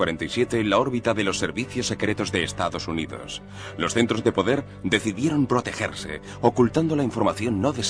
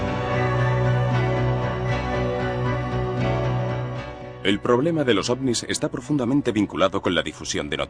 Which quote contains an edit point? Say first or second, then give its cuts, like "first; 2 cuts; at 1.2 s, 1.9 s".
first; 1 cut; at 6.5 s